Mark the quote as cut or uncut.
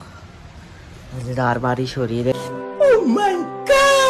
uncut